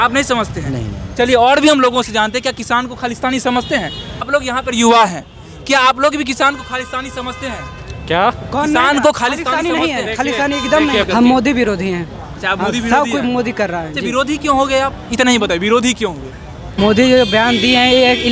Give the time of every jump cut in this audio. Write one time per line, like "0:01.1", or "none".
0:04.2
0:11.1
0:16.8